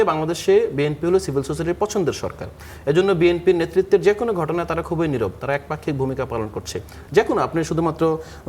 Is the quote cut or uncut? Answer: uncut